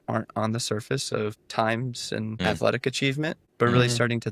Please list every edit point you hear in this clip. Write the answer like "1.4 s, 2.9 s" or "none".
1.4 s, 2.4 s, 3.4 s